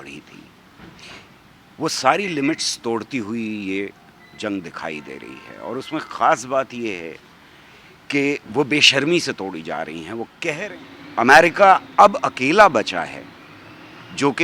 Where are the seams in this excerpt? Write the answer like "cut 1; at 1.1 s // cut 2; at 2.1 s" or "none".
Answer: cut 1; at 10.6 s